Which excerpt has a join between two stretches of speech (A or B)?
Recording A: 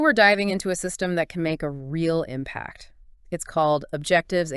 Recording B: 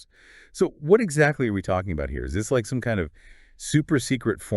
B